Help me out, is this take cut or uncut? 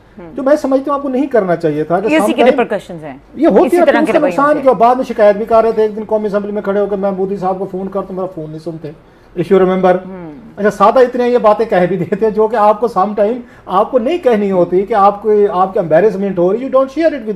uncut